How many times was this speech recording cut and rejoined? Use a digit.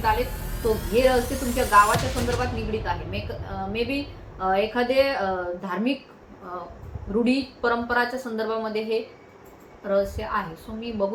0